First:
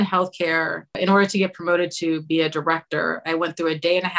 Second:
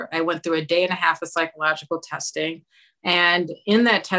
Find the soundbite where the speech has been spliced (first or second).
first